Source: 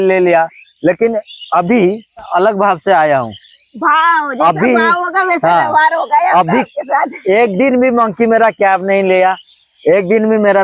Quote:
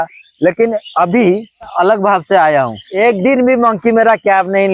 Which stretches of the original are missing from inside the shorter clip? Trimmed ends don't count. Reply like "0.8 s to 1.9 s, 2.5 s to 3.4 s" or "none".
1.3 s to 1.4 s, 3.4 s to 7.2 s